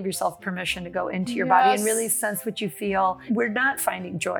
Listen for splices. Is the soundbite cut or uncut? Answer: cut